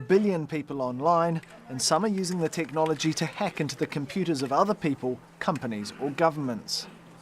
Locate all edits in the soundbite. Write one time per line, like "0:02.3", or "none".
0:05.3